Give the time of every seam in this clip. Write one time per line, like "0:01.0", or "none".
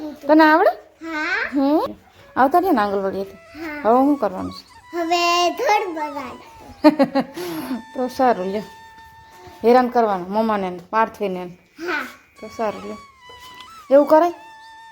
0:01.9